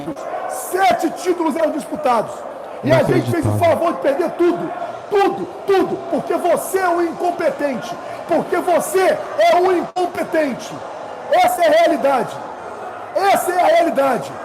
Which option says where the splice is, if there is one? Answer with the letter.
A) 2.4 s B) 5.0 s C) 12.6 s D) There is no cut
D